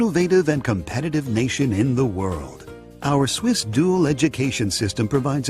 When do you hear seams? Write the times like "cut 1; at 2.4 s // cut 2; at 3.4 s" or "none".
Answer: cut 1; at 4.0 s